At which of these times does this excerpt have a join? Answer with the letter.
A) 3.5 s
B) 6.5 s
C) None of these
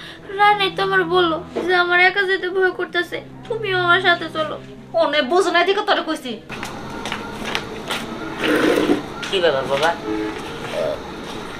B